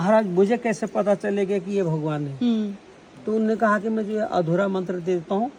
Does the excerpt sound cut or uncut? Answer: uncut